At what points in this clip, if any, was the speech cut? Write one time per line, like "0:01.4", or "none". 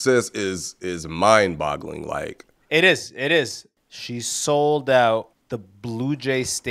0:03.4
0:05.4